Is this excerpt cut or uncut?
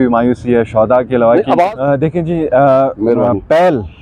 cut